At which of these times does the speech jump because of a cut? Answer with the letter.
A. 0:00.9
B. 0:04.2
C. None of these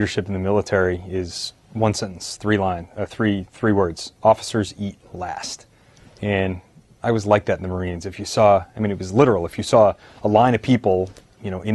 A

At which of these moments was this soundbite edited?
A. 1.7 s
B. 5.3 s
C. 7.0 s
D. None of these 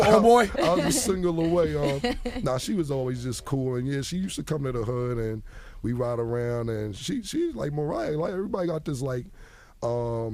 C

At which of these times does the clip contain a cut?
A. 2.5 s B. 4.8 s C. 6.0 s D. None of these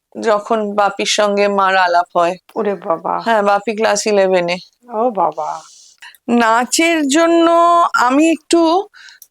C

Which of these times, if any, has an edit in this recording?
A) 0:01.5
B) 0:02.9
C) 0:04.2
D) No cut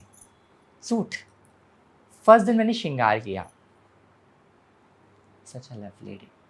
D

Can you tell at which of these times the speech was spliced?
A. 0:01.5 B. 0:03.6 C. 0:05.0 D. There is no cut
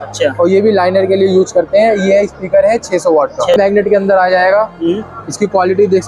B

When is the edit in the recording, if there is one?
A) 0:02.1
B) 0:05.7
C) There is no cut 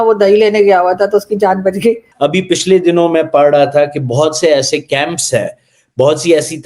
A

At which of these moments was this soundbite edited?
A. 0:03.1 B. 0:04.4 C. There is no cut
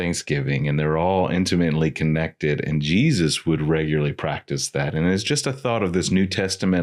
C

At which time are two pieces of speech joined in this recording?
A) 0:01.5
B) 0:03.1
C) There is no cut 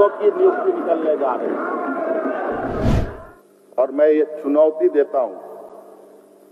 B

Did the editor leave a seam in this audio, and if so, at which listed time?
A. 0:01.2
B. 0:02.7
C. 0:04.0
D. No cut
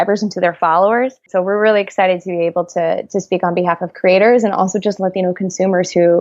A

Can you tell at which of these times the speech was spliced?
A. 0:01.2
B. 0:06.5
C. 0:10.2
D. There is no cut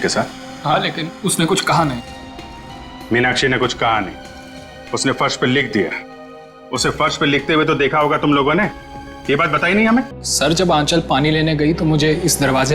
C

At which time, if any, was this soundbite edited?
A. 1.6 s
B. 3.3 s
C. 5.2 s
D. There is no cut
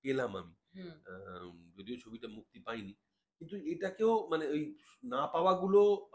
D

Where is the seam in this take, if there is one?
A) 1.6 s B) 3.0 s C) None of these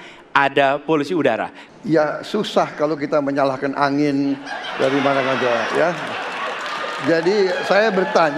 A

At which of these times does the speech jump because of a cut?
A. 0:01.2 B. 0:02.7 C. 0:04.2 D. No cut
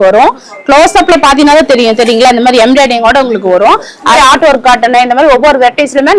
C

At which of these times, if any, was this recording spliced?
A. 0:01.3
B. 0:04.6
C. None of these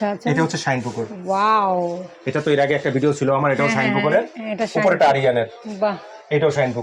C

